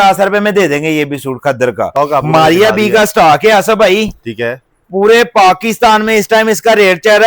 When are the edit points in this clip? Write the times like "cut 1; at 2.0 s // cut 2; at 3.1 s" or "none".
cut 1; at 2.0 s